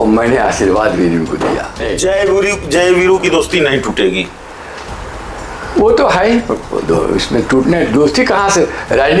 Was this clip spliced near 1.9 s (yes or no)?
yes